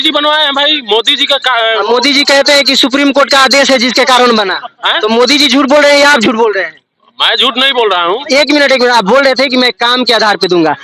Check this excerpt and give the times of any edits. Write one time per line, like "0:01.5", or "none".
0:08.2